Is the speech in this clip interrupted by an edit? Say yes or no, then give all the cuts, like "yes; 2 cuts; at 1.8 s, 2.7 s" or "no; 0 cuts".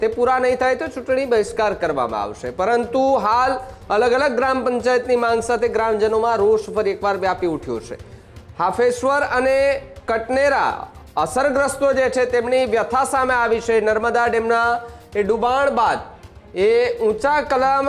no; 0 cuts